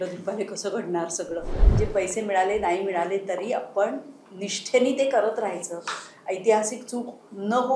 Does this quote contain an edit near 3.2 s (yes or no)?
no